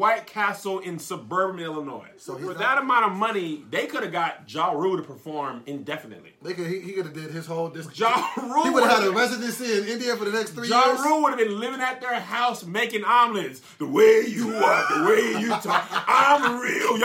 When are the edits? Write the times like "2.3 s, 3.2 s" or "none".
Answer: 2.5 s